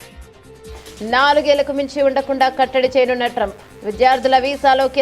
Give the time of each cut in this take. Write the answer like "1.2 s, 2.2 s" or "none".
1.0 s

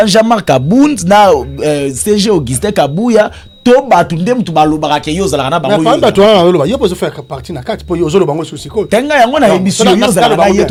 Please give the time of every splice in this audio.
none

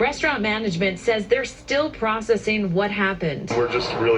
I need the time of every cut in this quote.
1.5 s

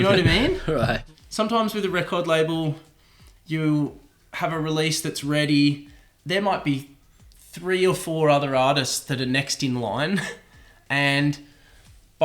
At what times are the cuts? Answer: 1.0 s

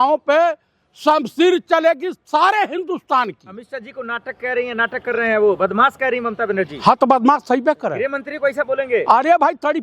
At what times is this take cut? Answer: none

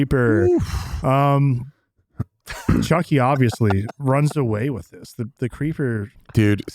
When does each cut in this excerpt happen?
none

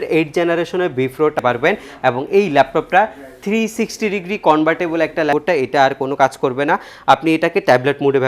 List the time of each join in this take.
1.4 s, 5.3 s

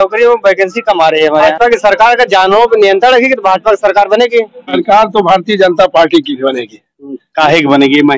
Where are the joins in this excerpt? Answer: 1.5 s, 4.7 s

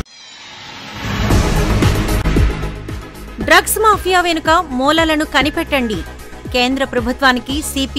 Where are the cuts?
2.2 s

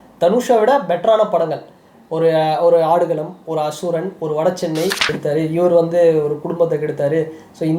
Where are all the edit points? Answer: 5.1 s

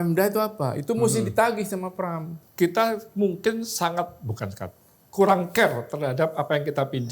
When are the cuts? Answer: 2.4 s

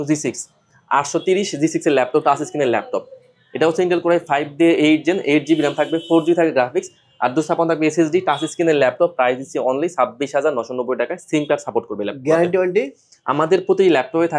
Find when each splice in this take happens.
none

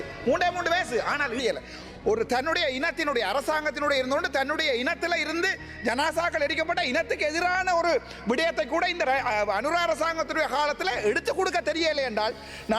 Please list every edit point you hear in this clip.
1.4 s

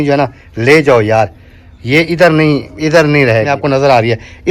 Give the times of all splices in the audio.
3.5 s

